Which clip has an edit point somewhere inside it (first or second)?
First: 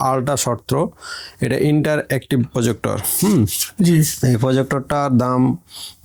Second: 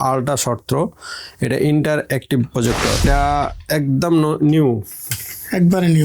second